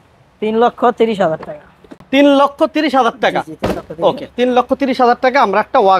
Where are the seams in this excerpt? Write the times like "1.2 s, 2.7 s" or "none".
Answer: none